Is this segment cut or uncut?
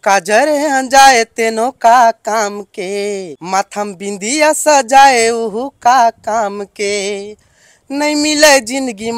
cut